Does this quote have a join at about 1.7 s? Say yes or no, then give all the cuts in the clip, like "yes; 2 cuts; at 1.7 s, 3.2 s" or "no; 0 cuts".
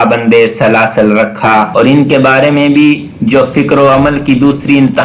yes; 1 cut; at 1.7 s